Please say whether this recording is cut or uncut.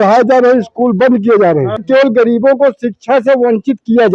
cut